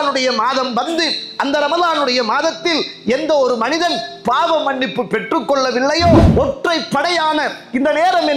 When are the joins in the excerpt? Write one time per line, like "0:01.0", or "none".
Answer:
0:06.3